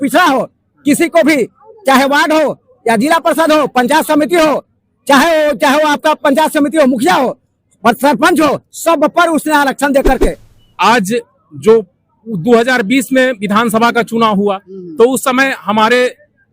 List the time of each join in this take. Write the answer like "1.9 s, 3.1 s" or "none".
10.5 s